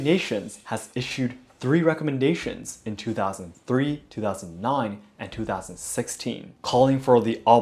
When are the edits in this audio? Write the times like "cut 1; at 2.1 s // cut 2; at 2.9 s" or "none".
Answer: none